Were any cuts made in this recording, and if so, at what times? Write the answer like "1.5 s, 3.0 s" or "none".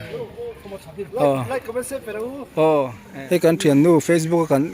3.0 s